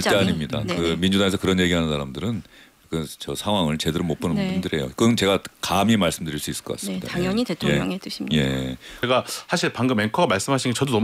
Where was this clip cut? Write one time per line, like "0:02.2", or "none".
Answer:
0:09.0